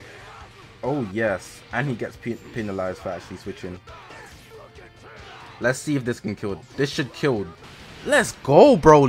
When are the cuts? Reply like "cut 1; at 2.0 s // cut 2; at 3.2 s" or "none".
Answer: cut 1; at 4.1 s // cut 2; at 7.7 s